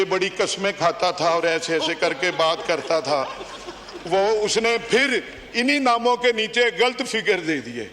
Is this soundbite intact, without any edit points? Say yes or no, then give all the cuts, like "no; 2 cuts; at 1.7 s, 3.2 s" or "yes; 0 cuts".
yes; 0 cuts